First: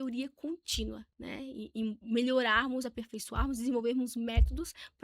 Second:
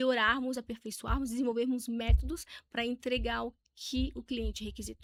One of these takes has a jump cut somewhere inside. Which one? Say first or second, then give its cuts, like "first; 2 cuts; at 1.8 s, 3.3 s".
first; 1 cut; at 1.1 s